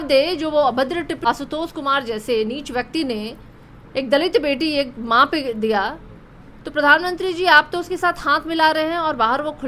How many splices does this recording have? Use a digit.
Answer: 1